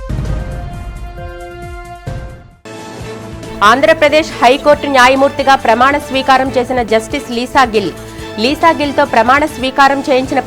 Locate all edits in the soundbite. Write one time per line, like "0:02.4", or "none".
0:02.0